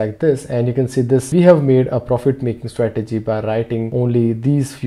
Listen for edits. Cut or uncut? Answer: cut